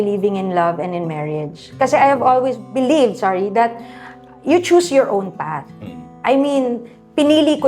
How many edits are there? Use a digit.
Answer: 1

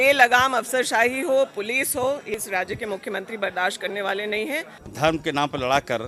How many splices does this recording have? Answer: 2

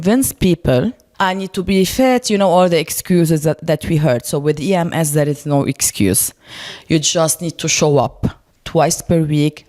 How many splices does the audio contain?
1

